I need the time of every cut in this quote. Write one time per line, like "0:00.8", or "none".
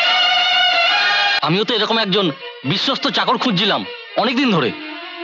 0:01.4